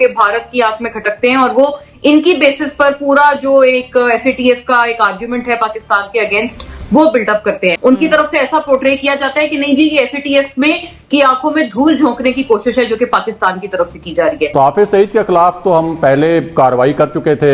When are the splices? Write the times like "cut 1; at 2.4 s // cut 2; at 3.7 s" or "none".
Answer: cut 1; at 7.8 s // cut 2; at 14.5 s

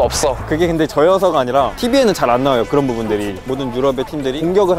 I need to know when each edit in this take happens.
cut 1; at 1.7 s

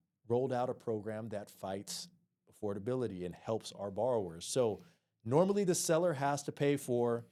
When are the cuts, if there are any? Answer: none

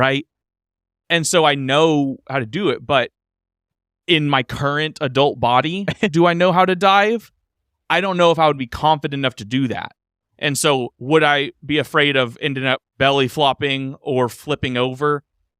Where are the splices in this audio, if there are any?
none

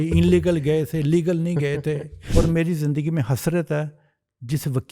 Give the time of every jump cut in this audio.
cut 1; at 2.2 s

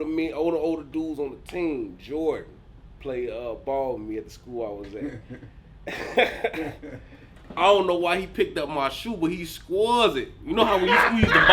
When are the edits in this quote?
none

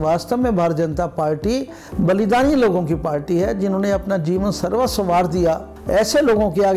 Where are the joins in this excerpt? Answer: cut 1; at 1.8 s // cut 2; at 5.7 s

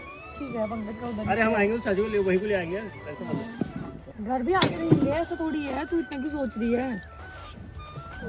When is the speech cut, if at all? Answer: cut 1; at 4.0 s

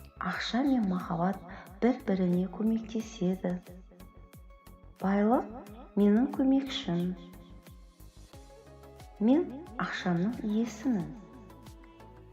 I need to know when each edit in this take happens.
cut 1; at 7.5 s // cut 2; at 9.2 s

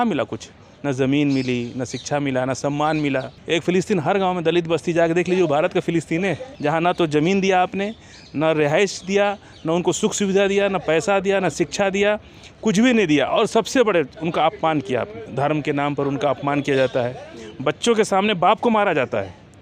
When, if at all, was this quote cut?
cut 1; at 3.3 s // cut 2; at 6.5 s // cut 3; at 15.2 s

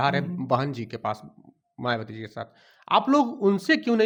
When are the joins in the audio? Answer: none

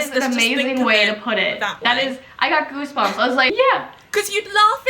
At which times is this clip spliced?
cut 1; at 3.5 s

